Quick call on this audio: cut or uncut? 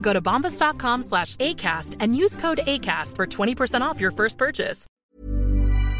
cut